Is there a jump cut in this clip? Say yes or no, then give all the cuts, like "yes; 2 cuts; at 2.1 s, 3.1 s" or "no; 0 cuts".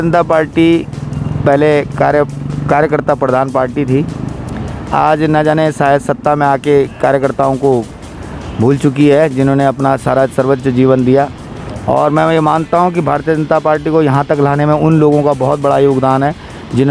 no; 0 cuts